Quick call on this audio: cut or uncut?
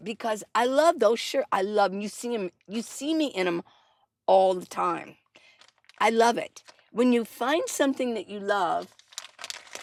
uncut